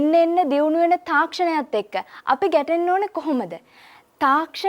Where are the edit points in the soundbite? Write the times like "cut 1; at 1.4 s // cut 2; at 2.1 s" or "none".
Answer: none